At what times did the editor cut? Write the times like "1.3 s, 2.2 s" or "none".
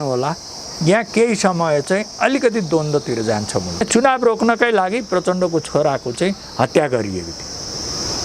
3.8 s

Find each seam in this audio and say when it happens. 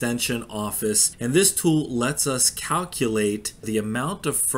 1.1 s, 3.7 s

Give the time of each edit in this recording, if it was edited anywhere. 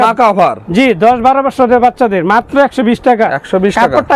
none

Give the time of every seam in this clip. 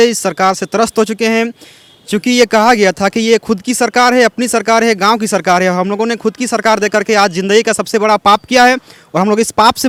none

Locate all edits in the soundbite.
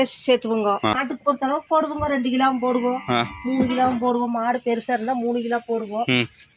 none

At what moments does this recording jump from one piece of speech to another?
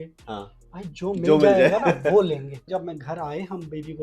2.6 s

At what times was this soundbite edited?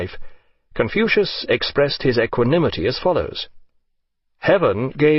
none

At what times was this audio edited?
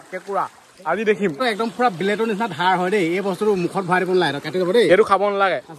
1.4 s

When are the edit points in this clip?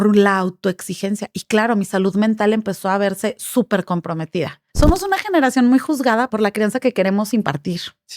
4.6 s, 6.3 s

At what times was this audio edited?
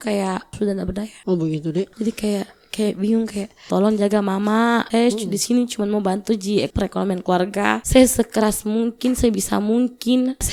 3.6 s, 4.9 s, 6.7 s, 7.8 s

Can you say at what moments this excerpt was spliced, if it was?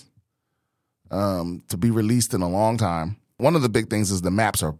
3.4 s

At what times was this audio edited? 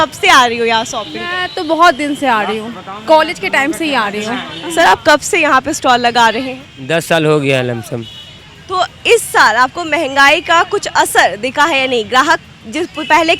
4.6 s

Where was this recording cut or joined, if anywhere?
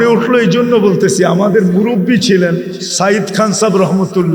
none

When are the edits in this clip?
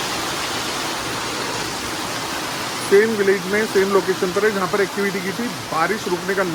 none

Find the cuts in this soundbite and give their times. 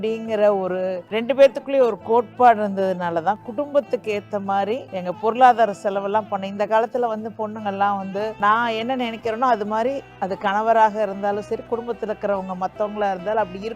1.0 s

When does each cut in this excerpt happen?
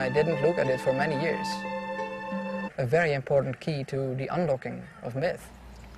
none

